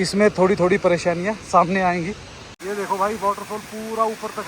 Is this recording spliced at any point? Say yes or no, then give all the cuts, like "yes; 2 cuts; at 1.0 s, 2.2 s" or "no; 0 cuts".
yes; 1 cut; at 2.5 s